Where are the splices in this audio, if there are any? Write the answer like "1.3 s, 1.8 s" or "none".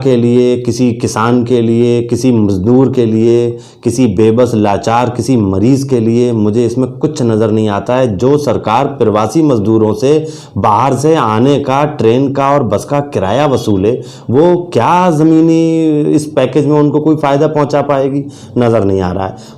none